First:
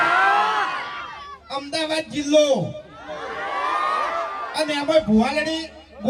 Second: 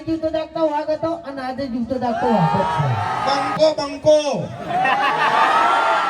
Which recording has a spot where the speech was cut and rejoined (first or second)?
second